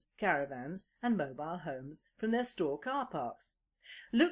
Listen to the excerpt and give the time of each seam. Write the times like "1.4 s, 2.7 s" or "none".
none